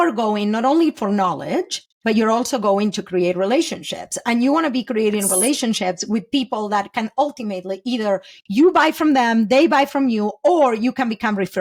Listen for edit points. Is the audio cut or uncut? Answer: uncut